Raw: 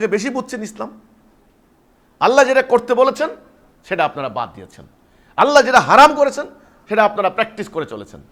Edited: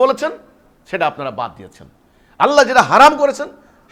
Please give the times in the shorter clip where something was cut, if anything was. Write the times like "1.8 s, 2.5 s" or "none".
none